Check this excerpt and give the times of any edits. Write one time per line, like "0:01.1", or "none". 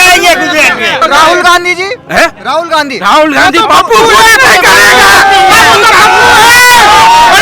0:01.0